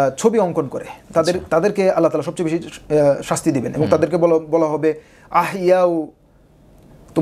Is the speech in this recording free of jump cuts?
yes; 0 cuts

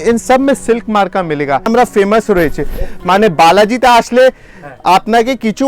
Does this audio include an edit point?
yes; 1 cut; at 1.7 s

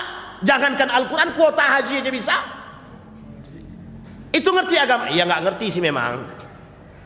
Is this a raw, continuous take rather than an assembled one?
yes; 0 cuts

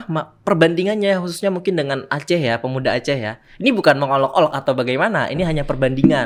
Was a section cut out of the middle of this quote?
no; 0 cuts

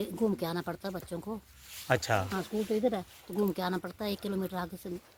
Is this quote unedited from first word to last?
yes; 0 cuts

